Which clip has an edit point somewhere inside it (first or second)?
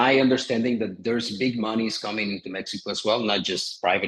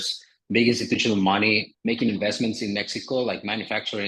second